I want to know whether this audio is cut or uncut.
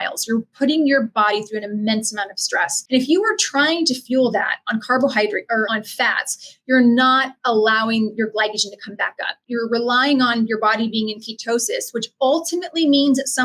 cut